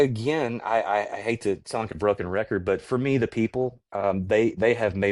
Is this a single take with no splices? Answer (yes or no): yes